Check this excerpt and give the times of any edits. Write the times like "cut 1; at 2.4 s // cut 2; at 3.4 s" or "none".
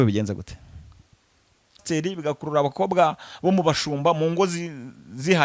cut 1; at 1.8 s